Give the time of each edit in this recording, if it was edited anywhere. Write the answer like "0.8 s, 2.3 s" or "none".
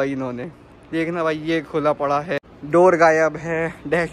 2.5 s